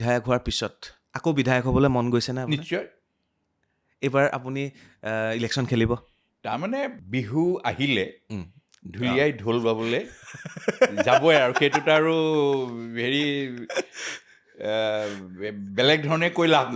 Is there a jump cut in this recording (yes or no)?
yes